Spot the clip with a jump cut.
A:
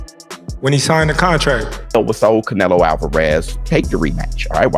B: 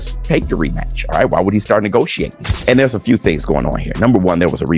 A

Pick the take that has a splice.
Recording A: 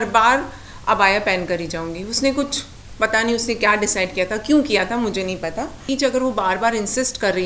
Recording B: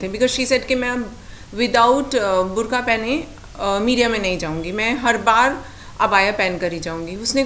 A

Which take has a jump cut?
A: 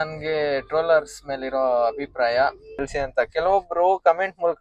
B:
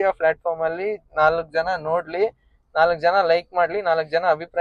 A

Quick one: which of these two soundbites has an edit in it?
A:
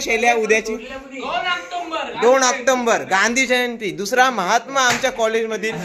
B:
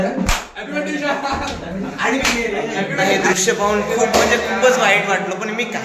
B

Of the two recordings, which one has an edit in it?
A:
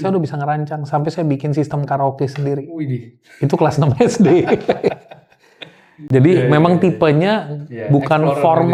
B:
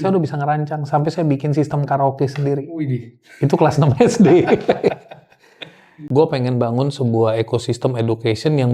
B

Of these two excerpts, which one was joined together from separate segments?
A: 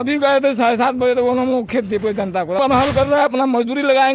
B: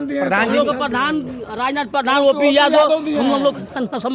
A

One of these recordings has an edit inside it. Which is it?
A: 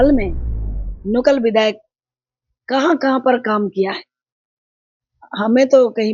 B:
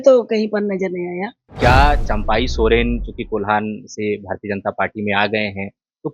B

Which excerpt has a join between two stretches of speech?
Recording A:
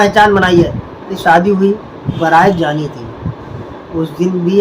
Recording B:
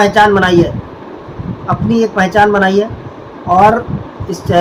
A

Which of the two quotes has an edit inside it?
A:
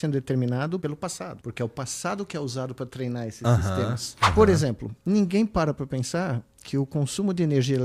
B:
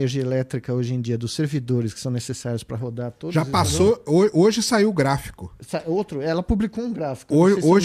A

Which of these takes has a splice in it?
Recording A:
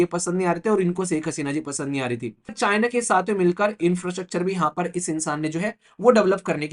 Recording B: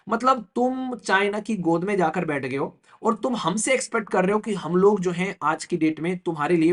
A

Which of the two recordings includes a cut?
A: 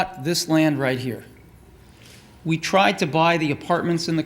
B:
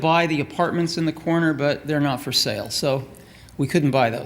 A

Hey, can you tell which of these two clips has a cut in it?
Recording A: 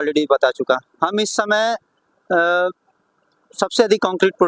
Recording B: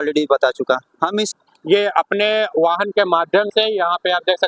B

